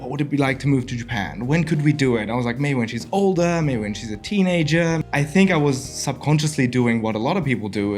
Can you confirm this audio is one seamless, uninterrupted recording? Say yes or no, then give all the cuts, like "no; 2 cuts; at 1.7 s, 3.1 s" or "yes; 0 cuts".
no; 1 cut; at 5.0 s